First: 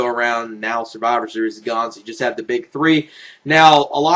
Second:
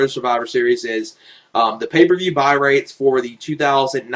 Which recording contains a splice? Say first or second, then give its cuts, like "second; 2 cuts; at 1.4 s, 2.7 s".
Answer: second; 1 cut; at 2.2 s